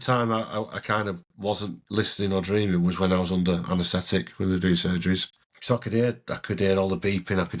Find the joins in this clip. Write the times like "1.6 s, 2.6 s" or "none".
none